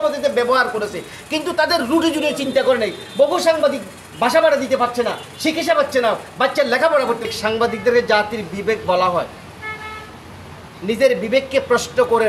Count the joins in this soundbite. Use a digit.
1